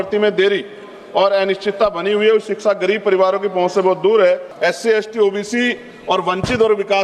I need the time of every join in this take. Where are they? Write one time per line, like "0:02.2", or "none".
0:04.5